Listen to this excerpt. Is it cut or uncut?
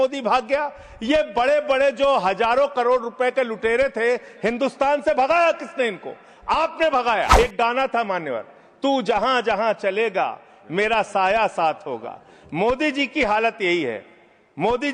cut